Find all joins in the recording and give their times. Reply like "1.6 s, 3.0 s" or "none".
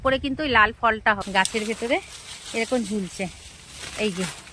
1.2 s